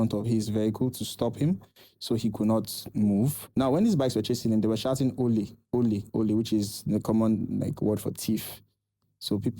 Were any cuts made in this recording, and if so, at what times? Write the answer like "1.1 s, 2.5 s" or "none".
3.4 s